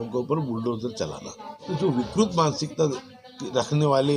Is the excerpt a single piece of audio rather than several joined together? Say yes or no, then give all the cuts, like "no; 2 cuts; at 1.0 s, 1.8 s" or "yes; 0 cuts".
no; 1 cut; at 1.7 s